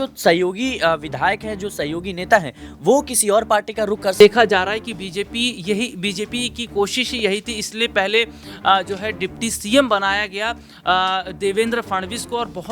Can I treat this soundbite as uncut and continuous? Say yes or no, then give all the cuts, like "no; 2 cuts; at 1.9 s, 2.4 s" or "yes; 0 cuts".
no; 1 cut; at 4.1 s